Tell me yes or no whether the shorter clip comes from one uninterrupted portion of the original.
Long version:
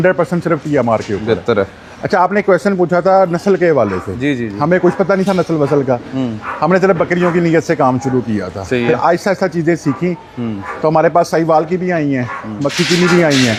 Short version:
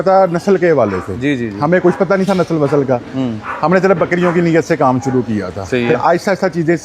yes